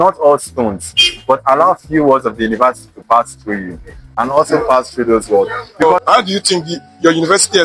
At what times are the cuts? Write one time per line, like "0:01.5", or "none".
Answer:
0:05.8